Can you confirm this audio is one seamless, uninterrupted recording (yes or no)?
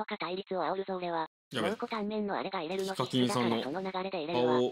yes